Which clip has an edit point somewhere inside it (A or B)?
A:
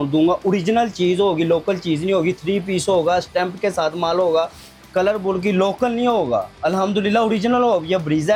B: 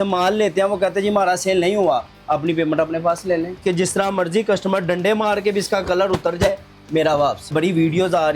B